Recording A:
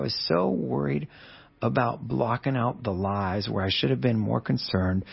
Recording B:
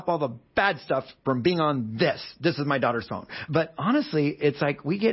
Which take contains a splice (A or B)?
B